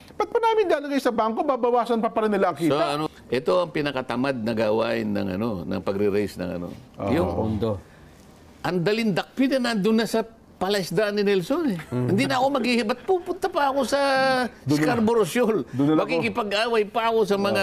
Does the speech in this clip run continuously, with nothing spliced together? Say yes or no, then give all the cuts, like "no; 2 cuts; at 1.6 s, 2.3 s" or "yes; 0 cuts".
no; 1 cut; at 3.0 s